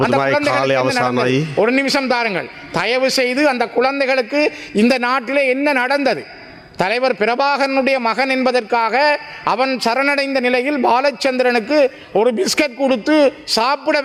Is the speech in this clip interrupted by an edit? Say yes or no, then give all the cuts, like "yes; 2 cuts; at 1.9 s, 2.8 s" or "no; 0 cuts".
no; 0 cuts